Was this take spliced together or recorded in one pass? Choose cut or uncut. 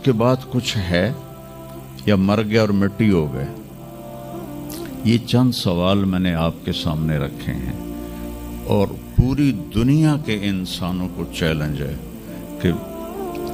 uncut